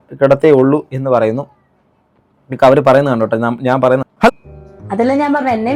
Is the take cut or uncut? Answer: cut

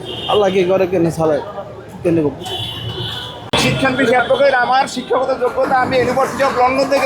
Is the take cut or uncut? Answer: cut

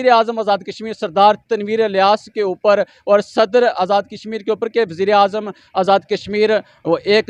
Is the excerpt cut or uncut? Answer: uncut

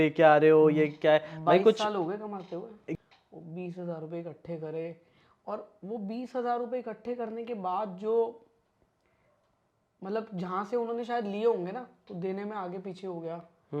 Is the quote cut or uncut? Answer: cut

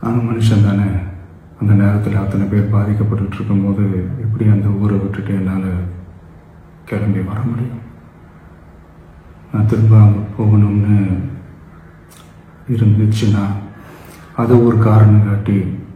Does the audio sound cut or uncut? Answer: uncut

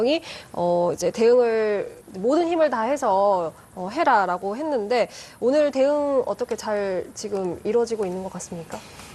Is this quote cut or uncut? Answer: uncut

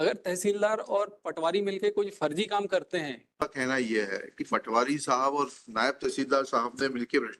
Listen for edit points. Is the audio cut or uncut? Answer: cut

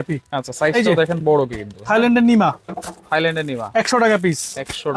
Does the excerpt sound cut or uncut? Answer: uncut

